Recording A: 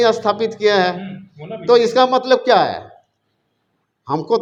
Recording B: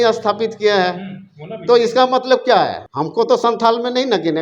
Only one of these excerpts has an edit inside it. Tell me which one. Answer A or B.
B